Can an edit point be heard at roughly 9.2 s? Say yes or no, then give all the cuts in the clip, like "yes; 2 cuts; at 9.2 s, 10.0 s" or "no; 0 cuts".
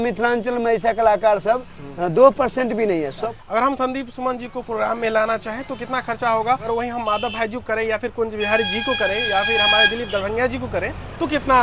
no; 2 cuts; at 3.2 s, 6.7 s